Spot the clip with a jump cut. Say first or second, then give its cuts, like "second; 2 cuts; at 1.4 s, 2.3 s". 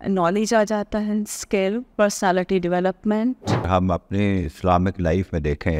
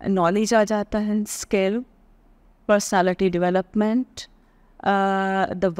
first; 2 cuts; at 1.9 s, 3.7 s